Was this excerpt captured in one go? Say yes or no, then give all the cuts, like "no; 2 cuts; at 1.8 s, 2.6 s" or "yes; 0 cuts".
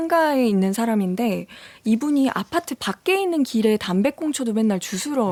yes; 0 cuts